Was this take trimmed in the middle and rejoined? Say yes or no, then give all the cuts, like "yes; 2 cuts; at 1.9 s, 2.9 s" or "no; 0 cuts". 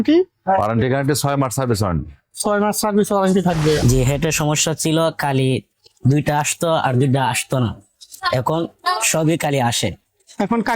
yes; 1 cut; at 3.8 s